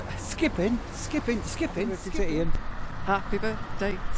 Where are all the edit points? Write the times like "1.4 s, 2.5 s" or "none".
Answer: 2.0 s